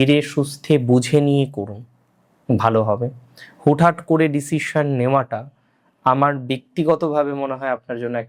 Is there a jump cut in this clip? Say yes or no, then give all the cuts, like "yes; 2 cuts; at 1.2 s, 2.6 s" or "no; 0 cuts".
no; 0 cuts